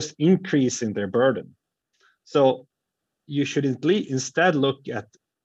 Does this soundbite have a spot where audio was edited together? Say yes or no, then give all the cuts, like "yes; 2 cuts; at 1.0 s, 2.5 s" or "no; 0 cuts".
no; 0 cuts